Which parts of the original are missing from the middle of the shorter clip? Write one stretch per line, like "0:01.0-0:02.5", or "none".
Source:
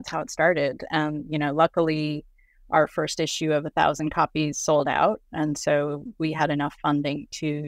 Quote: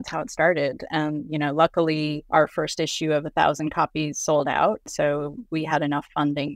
0:02.2-0:02.6
0:05.3-0:05.6

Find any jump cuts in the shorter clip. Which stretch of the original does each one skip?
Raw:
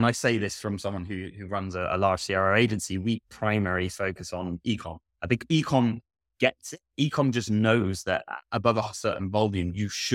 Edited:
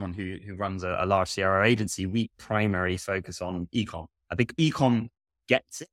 none

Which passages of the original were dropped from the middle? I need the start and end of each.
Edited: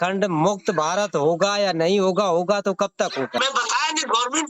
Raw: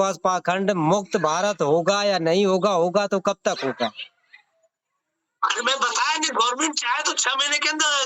0:03.8-0:05.6

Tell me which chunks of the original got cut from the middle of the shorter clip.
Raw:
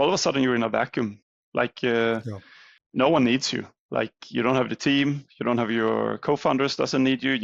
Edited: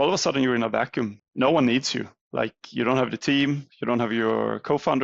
0:01.2-0:02.8

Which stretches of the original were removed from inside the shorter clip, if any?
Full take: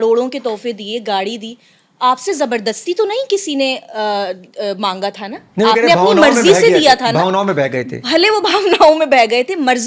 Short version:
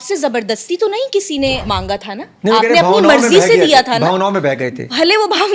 0:03.8-0:04.8

